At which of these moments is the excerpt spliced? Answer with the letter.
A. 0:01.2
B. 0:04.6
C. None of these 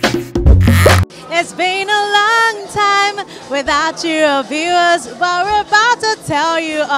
A